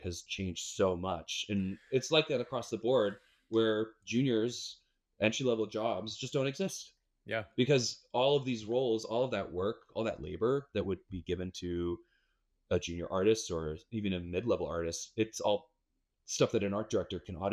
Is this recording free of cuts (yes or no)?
yes